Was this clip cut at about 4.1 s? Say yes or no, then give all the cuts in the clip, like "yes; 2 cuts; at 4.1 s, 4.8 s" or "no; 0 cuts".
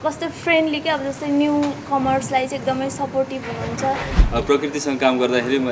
yes; 1 cut; at 4.1 s